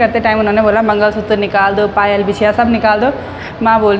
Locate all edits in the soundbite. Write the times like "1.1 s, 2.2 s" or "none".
none